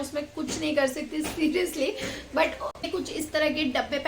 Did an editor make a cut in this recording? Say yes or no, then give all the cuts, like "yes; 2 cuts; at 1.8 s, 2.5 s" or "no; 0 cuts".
yes; 1 cut; at 2.8 s